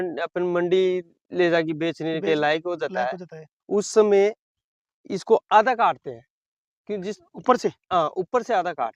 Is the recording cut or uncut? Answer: uncut